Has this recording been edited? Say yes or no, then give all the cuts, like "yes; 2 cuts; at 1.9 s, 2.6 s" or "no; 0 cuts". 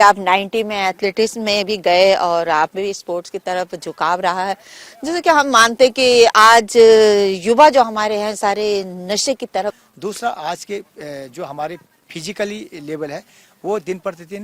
yes; 1 cut; at 9.8 s